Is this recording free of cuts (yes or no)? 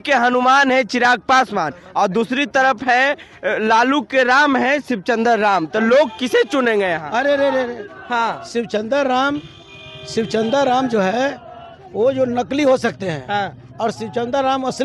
yes